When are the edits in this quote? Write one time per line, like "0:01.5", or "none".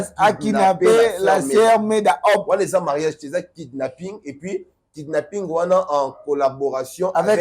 none